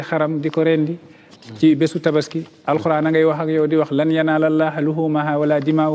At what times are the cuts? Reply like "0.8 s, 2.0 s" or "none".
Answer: none